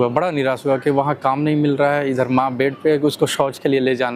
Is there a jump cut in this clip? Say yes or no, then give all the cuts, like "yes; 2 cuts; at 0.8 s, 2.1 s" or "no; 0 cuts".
no; 0 cuts